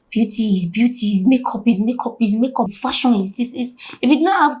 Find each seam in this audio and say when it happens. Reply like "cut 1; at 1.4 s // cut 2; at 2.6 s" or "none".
cut 1; at 2.8 s